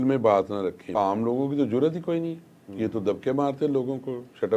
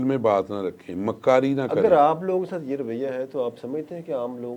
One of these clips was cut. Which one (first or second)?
first